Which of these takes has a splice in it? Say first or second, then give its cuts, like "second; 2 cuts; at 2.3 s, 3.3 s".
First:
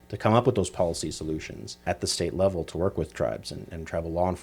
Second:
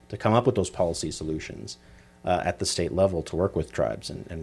first; 1 cut; at 1.8 s